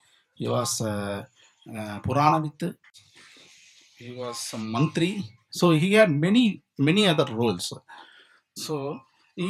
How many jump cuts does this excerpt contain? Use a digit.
0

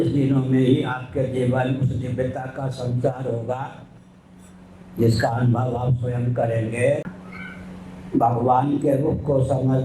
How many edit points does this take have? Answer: 1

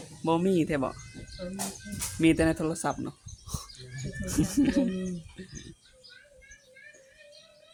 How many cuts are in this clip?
0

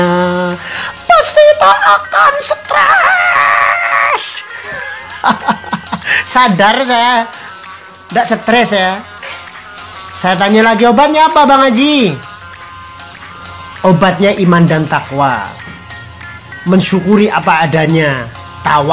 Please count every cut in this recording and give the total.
0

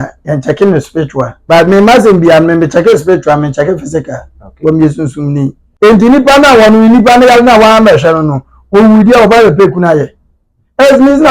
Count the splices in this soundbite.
2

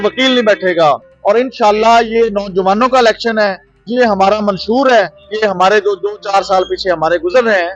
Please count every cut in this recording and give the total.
1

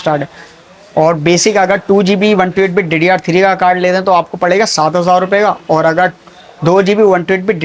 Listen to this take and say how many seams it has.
0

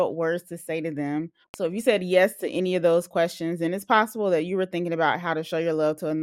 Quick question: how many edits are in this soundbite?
1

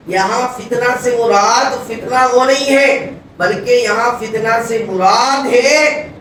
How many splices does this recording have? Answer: 0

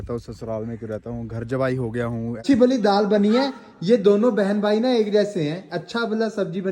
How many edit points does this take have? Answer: 1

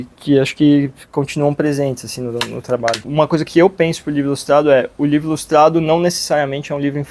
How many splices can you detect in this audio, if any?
1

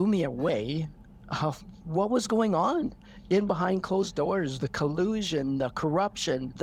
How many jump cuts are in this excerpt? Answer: 0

